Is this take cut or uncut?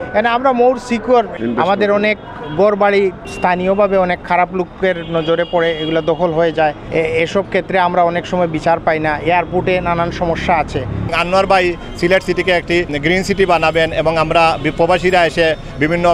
cut